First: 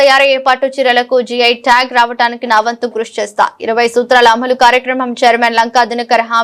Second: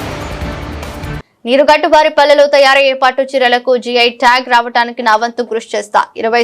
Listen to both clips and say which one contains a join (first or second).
second